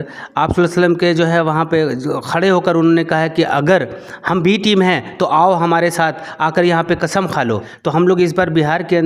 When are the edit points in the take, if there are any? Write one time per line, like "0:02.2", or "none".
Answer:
0:07.7